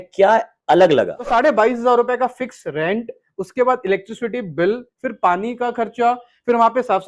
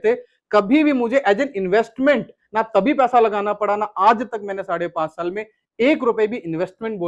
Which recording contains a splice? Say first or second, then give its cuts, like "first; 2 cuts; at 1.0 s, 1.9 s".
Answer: first; 1 cut; at 1.2 s